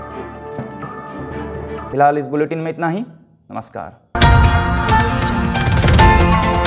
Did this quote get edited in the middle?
no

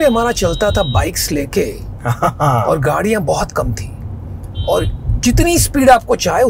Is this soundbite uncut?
yes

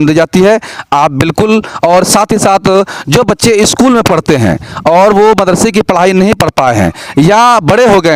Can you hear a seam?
no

